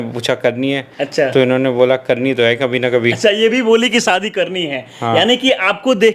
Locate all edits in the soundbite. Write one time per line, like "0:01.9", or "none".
none